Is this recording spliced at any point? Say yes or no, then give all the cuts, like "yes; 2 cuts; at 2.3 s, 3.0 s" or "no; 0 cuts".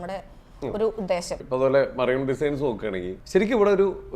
yes; 2 cuts; at 1.4 s, 3.1 s